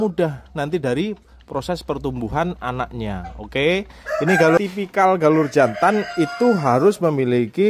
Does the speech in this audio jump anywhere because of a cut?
yes; 1 cut; at 4.6 s

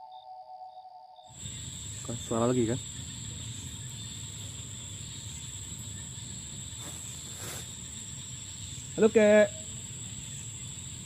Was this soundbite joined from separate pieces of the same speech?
yes; 1 cut; at 1.4 s

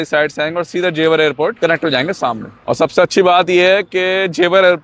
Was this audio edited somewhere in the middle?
yes; 2 cuts; at 1.6 s, 2.5 s

